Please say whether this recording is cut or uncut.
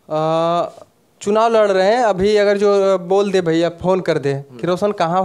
uncut